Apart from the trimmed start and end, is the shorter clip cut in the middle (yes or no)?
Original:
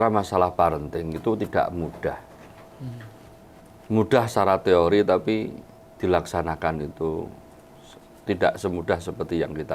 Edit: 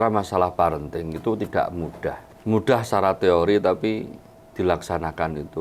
yes